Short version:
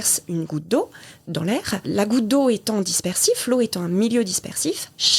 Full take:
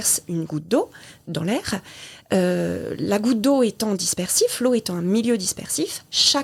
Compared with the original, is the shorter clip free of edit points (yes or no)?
no